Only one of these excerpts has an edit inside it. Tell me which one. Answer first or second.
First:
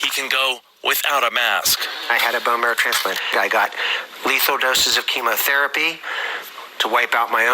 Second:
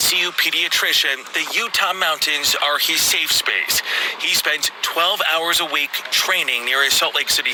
first